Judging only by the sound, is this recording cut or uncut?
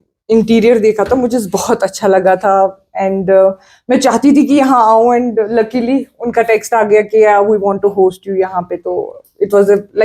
uncut